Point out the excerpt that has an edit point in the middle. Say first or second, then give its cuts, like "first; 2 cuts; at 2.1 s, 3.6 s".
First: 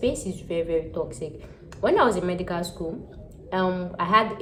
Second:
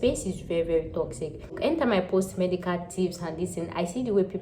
second; 1 cut; at 1.5 s